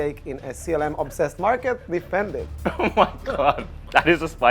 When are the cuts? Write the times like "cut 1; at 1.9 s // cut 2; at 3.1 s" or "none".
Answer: none